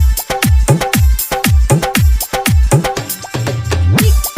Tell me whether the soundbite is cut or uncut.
uncut